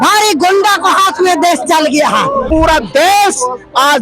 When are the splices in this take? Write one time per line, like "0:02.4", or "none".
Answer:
0:02.5